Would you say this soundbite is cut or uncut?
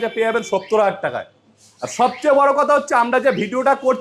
uncut